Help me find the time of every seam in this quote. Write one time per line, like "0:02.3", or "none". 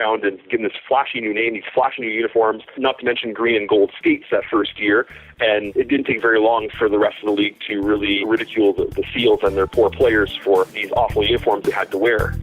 0:02.8
0:05.7
0:08.2
0:10.8